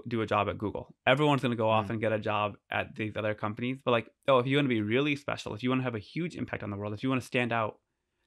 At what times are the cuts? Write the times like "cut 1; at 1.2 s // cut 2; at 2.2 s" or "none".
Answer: none